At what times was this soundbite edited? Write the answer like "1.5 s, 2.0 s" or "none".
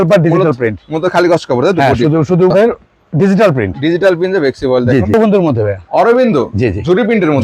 2.5 s, 5.1 s